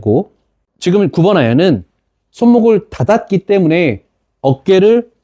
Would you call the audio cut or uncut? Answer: uncut